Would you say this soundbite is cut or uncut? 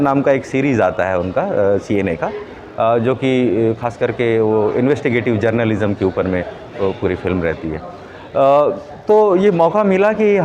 uncut